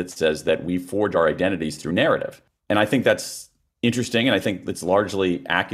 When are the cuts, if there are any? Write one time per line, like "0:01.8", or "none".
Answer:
0:01.1